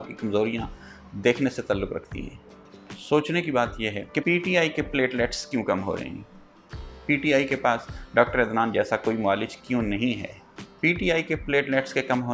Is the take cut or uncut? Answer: uncut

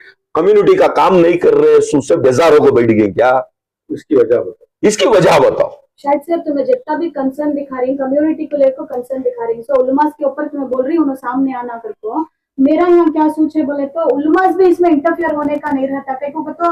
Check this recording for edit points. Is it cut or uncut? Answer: uncut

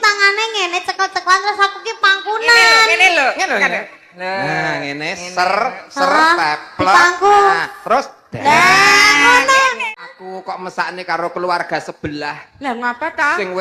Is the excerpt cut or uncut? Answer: cut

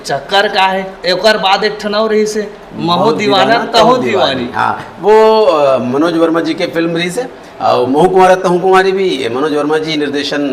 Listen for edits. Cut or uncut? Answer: uncut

